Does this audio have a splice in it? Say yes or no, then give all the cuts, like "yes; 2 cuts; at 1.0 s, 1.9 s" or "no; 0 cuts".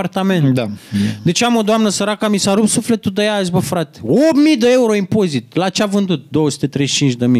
no; 0 cuts